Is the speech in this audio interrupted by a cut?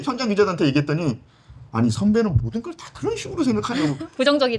no; 0 cuts

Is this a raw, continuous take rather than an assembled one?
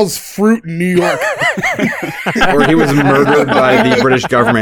yes; 0 cuts

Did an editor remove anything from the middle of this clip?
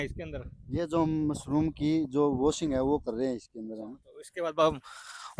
no; 0 cuts

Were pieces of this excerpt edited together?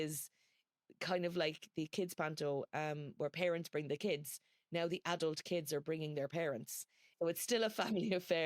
yes; 1 cut; at 7.0 s

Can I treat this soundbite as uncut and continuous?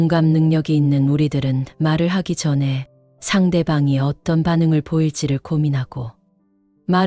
yes; 0 cuts

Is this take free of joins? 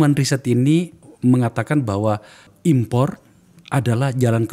no; 2 cuts; at 1.0 s, 2.5 s

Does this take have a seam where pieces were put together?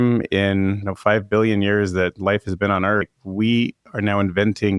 yes; 2 cuts; at 0.9 s, 3.1 s

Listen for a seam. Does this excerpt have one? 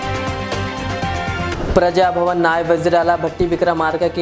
yes; 1 cut; at 1.5 s

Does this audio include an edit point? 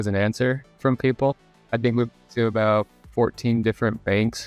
yes; 1 cut; at 1.4 s

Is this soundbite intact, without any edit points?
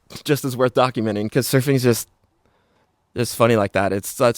no; 1 cut; at 1.3 s

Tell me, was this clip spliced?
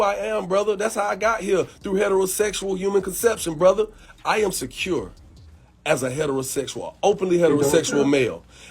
yes; 1 cut; at 4.0 s

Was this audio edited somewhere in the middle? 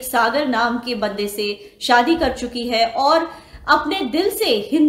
no; 0 cuts

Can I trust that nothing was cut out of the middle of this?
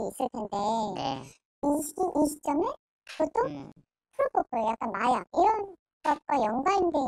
yes; 0 cuts

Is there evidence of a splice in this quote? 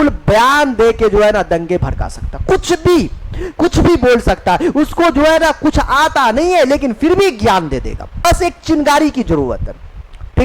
yes; 1 cut; at 8.2 s

